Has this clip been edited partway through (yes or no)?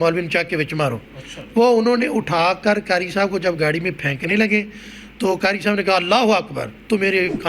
no